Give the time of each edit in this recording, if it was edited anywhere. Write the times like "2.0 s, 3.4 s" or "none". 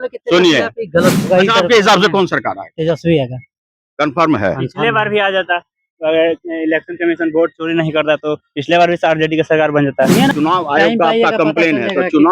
1.3 s, 10.3 s